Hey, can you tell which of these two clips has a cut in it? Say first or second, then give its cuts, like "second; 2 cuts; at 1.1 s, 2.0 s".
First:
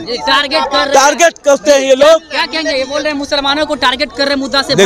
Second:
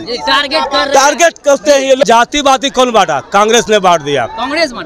second; 1 cut; at 2.0 s